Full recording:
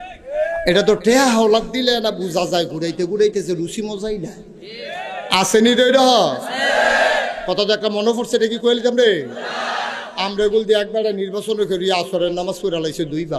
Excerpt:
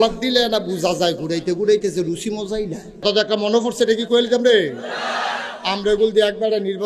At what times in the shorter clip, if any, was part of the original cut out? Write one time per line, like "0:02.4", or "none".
0:03.0